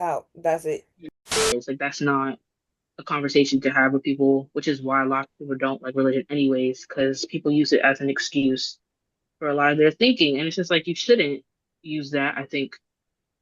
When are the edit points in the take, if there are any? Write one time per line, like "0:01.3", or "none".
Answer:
0:01.3